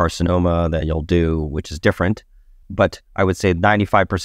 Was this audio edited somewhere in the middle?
no; 0 cuts

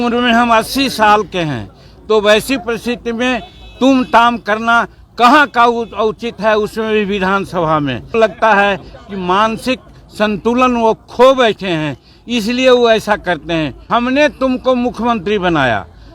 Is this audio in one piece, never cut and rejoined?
no; 2 cuts; at 8.1 s, 13.8 s

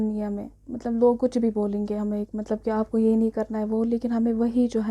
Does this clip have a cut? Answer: no; 0 cuts

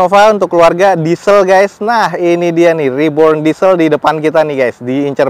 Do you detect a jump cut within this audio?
no; 0 cuts

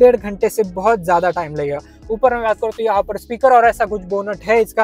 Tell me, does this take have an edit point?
no; 0 cuts

